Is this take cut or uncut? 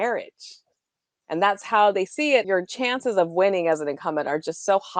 cut